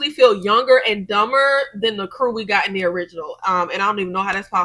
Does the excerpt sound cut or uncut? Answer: uncut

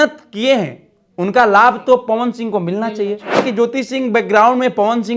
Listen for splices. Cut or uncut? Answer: cut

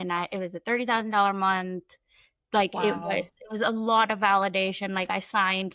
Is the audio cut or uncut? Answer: uncut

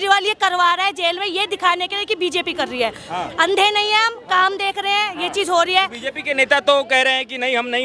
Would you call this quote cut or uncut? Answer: uncut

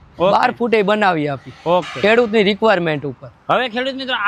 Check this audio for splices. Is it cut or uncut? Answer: uncut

